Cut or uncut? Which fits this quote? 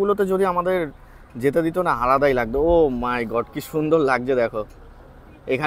uncut